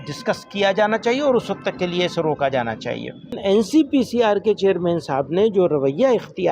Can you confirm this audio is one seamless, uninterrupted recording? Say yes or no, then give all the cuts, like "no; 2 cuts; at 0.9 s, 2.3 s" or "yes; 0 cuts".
no; 1 cut; at 3.4 s